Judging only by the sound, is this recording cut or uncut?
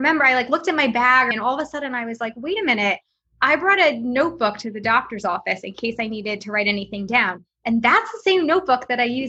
cut